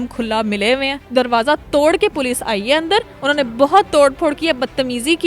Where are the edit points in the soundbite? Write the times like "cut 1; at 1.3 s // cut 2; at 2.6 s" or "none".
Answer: cut 1; at 1.1 s